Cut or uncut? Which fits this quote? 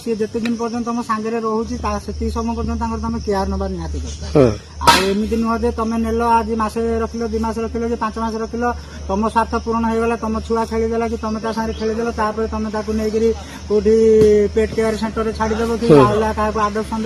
uncut